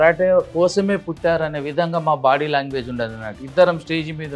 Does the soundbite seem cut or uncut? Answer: uncut